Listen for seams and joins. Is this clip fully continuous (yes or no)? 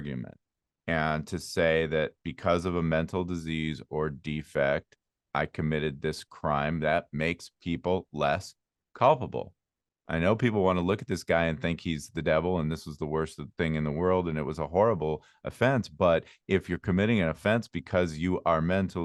yes